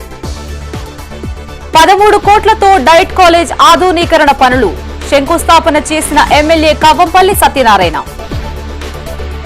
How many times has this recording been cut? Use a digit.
1